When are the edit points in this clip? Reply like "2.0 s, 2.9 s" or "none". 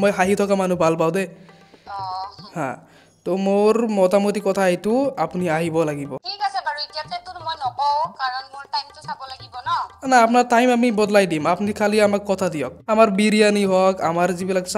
6.3 s, 12.7 s